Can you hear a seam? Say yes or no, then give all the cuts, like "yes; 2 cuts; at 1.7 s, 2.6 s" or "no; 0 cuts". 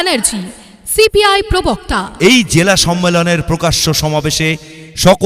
no; 0 cuts